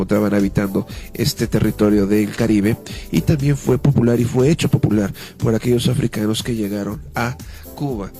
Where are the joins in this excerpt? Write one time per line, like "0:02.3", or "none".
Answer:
0:04.8